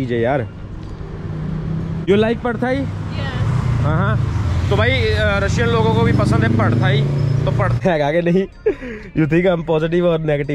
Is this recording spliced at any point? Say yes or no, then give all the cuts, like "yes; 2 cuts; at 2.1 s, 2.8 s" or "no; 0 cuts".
yes; 2 cuts; at 2.1 s, 7.8 s